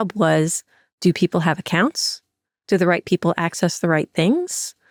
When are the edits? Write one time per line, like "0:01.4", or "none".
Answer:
none